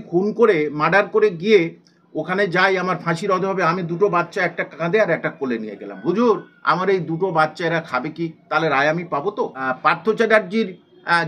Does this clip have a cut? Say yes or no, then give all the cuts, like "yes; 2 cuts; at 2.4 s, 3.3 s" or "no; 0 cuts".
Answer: yes; 1 cut; at 9.6 s